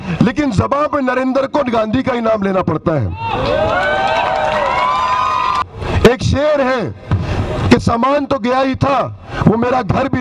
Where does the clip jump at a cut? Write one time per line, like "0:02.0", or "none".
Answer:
0:05.6